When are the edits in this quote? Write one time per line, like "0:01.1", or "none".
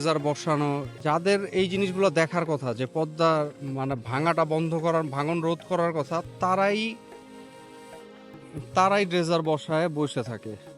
0:01.0